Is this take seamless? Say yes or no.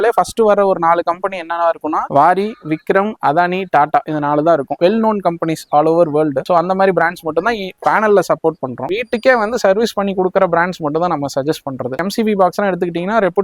no